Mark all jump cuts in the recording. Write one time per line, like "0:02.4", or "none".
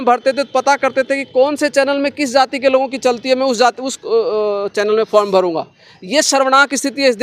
none